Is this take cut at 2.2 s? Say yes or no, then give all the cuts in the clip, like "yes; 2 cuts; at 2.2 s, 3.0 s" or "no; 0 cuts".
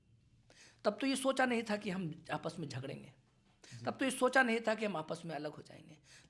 no; 0 cuts